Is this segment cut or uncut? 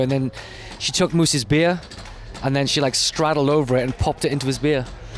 uncut